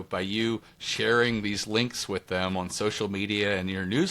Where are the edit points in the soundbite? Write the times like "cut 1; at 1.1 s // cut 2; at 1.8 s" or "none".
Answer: none